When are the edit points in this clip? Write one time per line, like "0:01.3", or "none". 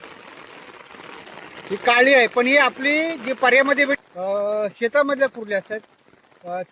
0:04.0